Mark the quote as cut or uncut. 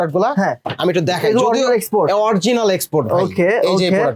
uncut